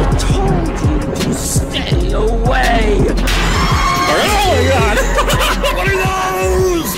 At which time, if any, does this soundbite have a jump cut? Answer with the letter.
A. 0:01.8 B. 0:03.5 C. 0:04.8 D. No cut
D